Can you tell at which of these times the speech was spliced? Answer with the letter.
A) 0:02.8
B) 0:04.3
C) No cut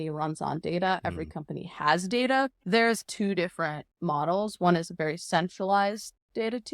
A